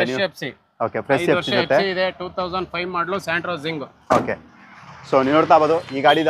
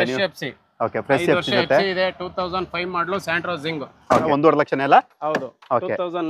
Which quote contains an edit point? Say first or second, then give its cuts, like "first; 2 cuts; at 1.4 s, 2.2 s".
second; 1 cut; at 4.3 s